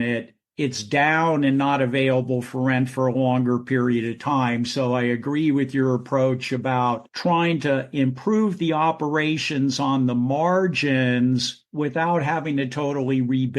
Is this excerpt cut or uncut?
cut